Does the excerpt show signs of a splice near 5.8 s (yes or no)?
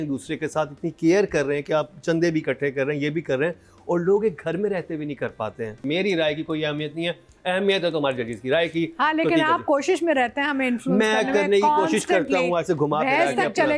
yes